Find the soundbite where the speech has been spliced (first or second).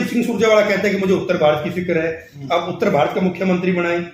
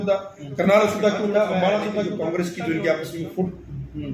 second